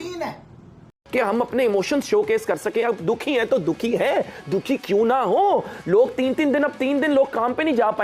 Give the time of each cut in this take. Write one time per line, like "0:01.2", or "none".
0:01.0